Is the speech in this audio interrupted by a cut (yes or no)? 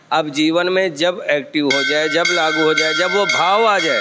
no